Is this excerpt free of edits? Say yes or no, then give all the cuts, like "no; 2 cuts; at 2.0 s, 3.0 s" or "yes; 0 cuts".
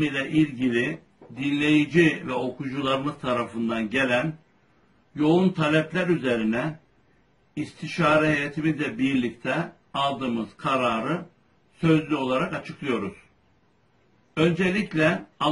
no; 1 cut; at 9.6 s